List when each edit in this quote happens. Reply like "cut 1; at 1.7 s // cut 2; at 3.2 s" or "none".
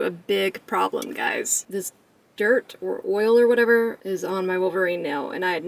cut 1; at 1.6 s // cut 2; at 4.0 s